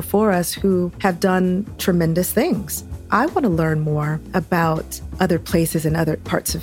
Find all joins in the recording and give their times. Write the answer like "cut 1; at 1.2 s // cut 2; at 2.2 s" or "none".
cut 1; at 2.8 s

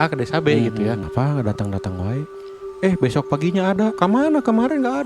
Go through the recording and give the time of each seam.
cut 1; at 1.0 s // cut 2; at 3.9 s

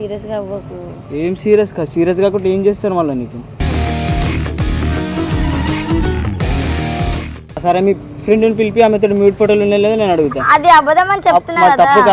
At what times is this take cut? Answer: cut 1; at 7.6 s

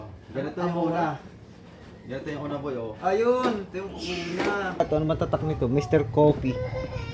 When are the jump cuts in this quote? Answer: cut 1; at 4.8 s

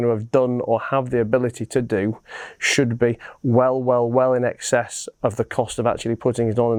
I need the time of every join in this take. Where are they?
none

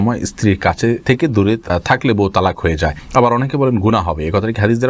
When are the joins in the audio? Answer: cut 1; at 3.0 s

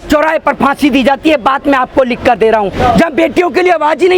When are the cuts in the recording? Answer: cut 1; at 2.7 s

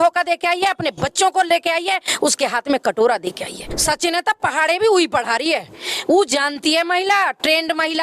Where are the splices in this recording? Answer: cut 1; at 3.7 s

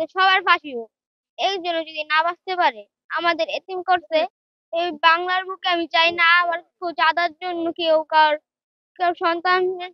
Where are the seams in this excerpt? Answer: none

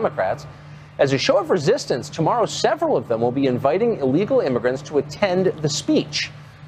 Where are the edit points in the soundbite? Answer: none

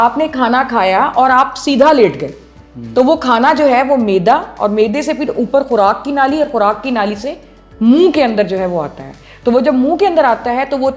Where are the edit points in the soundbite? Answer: none

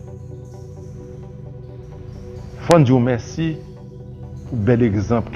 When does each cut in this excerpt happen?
cut 1; at 2.6 s

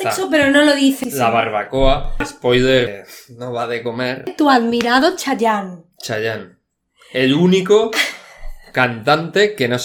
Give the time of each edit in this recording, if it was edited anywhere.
cut 1; at 1.0 s // cut 2; at 2.2 s // cut 3; at 2.9 s // cut 4; at 4.3 s

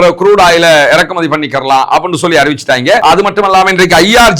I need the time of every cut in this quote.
cut 1; at 3.0 s

